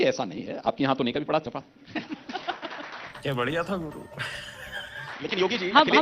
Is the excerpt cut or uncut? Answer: uncut